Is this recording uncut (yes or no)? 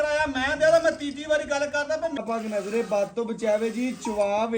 no